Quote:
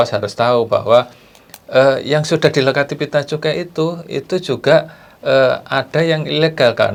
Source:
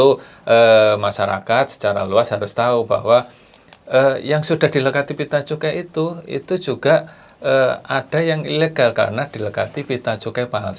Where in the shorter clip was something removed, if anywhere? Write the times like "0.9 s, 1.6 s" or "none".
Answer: none